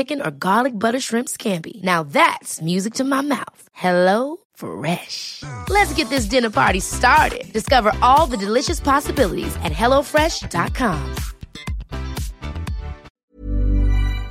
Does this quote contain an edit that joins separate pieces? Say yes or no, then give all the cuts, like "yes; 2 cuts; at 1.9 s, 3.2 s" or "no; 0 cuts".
yes; 1 cut; at 13.1 s